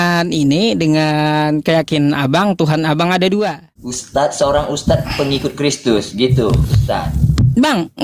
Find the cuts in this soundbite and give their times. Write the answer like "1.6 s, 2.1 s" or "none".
4.0 s